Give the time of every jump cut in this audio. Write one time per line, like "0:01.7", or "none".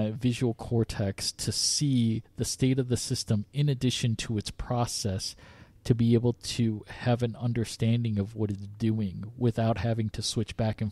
none